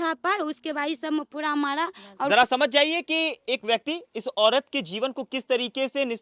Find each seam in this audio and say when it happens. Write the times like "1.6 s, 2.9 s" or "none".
2.3 s